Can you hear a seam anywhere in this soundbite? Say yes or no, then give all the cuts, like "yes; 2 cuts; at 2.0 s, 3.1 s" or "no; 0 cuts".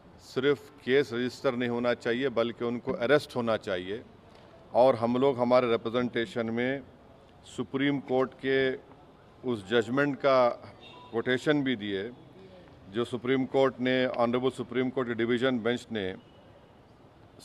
no; 0 cuts